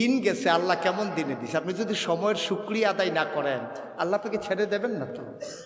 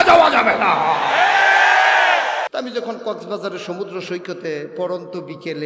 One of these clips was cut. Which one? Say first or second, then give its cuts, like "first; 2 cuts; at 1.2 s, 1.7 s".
second; 1 cut; at 2.5 s